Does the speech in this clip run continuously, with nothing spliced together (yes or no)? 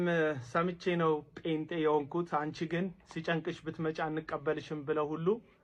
yes